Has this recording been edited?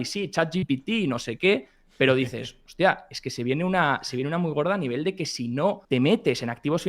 yes; 1 cut; at 5.8 s

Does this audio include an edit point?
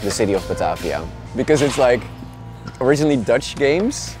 yes; 1 cut; at 1.2 s

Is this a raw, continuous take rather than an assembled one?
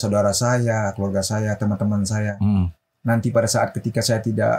yes; 0 cuts

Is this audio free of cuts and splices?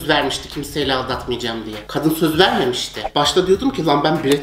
no; 2 cuts; at 1.8 s, 3.0 s

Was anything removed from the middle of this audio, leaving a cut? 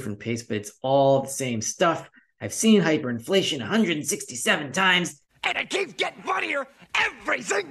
yes; 1 cut; at 5.3 s

